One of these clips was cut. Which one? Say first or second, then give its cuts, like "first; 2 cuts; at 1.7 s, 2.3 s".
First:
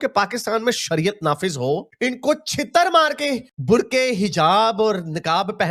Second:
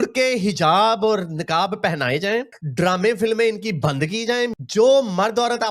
second; 1 cut; at 4.5 s